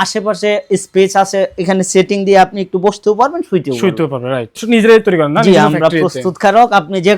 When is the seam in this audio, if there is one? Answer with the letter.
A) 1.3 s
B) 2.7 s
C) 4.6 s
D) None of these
C